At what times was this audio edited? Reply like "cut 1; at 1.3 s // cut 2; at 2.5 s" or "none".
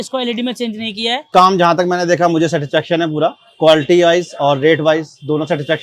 cut 1; at 1.2 s